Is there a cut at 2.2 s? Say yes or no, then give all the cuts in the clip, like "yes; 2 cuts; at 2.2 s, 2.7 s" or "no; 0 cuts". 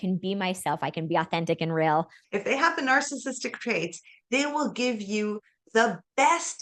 yes; 1 cut; at 2.2 s